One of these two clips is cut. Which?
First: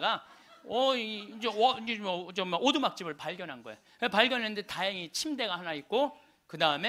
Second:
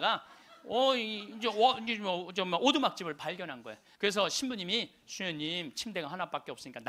second; 1 cut; at 3.8 s

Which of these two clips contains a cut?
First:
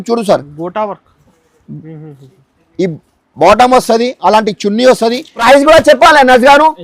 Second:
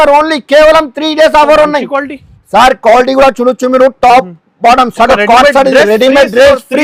first; 1 cut; at 5.4 s

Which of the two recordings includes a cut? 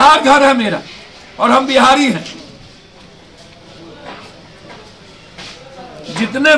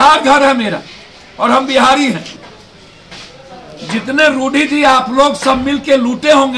second; 1 cut; at 2.4 s

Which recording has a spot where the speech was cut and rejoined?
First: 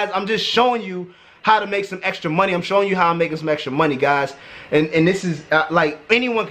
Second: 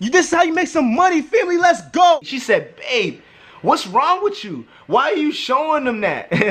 second; 1 cut; at 2.3 s

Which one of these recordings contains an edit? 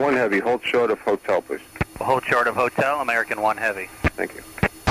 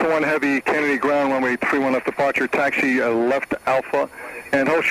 second; 1 cut; at 3.6 s

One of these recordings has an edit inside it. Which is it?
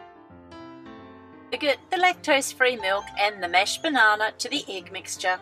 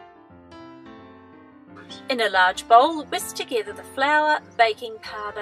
second; 1 cut; at 1.5 s

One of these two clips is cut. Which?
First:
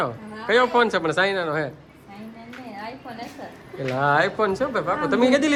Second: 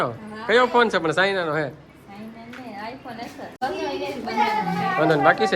second; 1 cut; at 3.6 s

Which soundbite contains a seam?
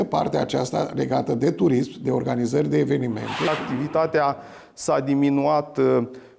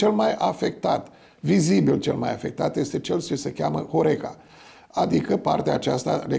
first; 1 cut; at 3.5 s

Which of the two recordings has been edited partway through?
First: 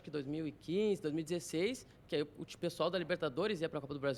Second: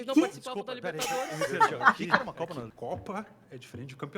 second; 1 cut; at 2.7 s

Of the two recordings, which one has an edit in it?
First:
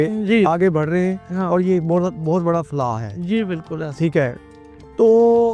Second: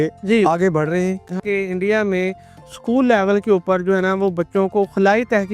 second; 1 cut; at 1.4 s

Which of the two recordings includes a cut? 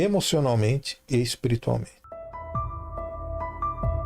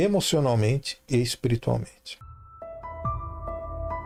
first; 1 cut; at 2.0 s

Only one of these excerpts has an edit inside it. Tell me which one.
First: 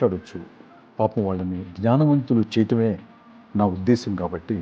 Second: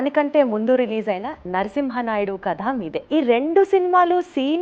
second; 1 cut; at 3.0 s

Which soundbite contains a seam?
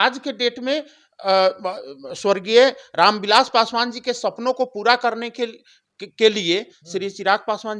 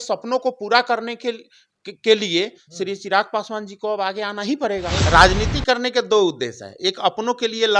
second; 1 cut; at 4.9 s

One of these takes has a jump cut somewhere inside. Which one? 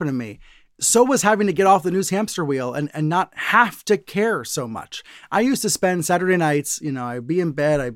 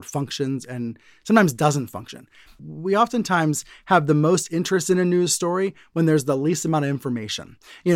second; 1 cut; at 2.7 s

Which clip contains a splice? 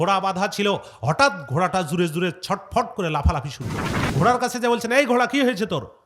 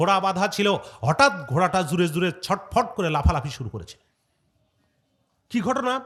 first; 1 cut; at 4.1 s

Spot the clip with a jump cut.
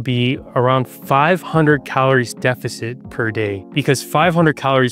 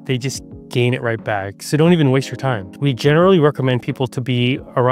second; 1 cut; at 2.7 s

